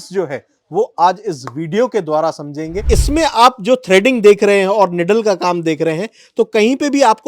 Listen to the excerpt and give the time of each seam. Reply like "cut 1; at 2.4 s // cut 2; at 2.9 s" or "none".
cut 1; at 2.8 s